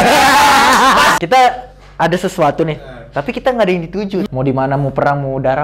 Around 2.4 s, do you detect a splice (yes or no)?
no